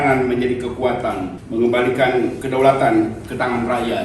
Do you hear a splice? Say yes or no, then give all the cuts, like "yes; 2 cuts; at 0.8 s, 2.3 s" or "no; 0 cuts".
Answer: yes; 2 cuts; at 1.4 s, 2.4 s